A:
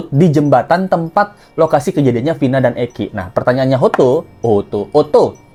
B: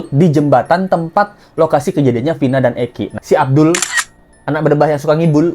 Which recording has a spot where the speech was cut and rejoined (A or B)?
B